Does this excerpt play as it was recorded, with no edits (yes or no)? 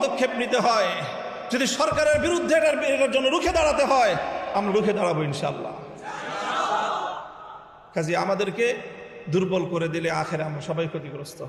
yes